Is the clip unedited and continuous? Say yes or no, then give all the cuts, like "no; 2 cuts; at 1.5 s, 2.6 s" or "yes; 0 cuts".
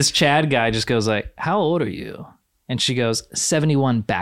yes; 0 cuts